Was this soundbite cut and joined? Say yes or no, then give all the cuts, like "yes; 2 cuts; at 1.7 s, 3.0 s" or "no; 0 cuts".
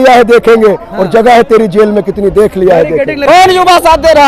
yes; 1 cut; at 3.2 s